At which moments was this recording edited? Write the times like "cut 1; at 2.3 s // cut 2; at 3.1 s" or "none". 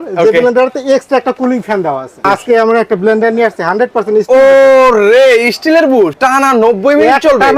cut 1; at 2.3 s // cut 2; at 6.1 s